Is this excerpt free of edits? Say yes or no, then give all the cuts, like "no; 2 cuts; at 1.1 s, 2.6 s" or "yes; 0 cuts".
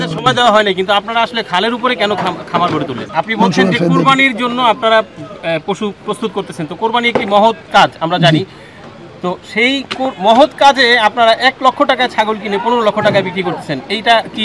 no; 1 cut; at 3.0 s